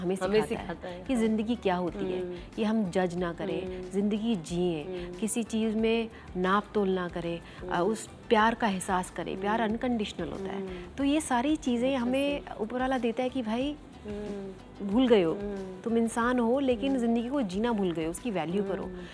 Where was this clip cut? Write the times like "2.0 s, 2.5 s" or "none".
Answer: none